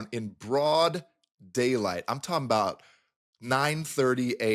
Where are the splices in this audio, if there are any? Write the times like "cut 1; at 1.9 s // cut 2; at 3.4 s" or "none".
none